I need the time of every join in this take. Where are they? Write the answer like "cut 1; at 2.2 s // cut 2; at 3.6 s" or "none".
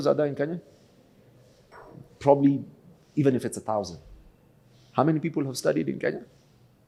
none